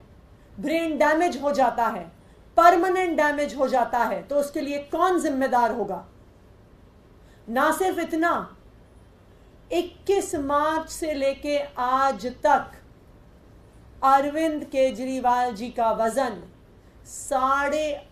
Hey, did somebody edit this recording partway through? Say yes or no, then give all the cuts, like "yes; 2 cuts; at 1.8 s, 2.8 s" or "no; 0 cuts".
no; 0 cuts